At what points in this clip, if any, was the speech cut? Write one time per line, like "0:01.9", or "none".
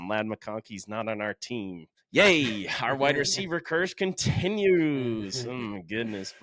0:01.9